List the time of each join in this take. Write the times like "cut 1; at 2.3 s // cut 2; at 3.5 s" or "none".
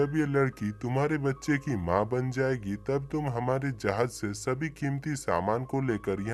none